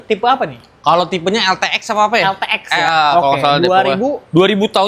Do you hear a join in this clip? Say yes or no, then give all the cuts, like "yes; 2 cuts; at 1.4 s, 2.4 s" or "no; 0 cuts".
no; 0 cuts